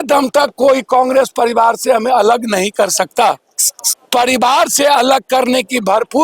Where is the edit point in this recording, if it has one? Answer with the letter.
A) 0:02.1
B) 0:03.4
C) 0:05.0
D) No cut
B